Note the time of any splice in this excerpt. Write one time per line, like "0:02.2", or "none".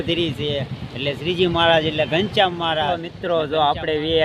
0:03.2